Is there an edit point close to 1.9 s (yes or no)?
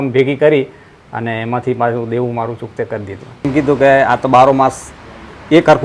no